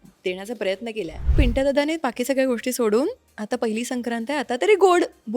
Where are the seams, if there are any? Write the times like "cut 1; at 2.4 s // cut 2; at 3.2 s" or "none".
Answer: cut 1; at 1.3 s